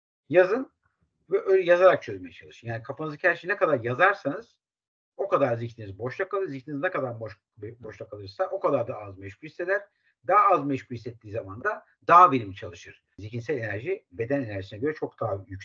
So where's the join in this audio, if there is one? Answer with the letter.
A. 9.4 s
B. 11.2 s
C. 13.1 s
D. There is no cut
C